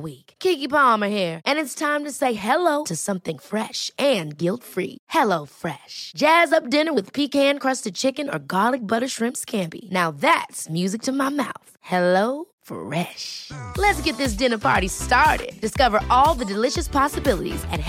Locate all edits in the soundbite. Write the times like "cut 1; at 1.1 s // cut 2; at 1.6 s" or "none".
none